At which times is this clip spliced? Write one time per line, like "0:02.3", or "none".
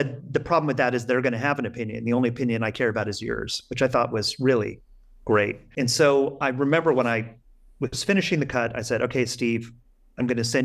0:05.6